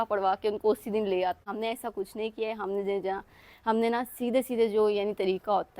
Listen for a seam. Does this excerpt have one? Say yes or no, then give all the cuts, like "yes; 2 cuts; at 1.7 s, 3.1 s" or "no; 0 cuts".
yes; 1 cut; at 1.5 s